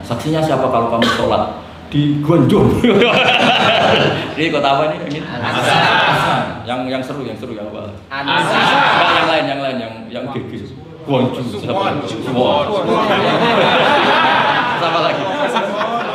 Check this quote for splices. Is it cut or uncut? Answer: uncut